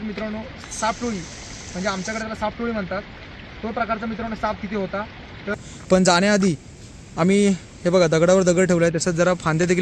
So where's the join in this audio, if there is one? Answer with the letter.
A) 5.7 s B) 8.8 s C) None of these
A